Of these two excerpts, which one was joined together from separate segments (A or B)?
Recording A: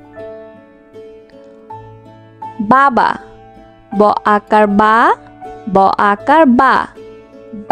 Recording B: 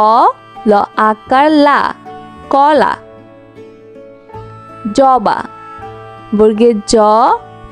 B